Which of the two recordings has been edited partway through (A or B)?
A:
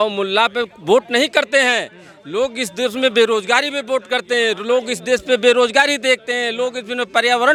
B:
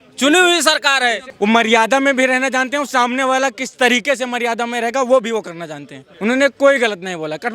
B